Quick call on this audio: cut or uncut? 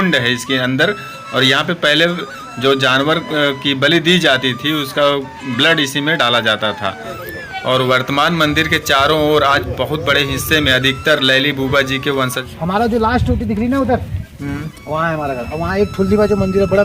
cut